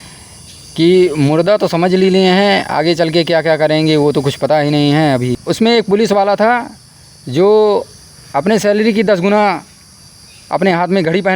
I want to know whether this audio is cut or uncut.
cut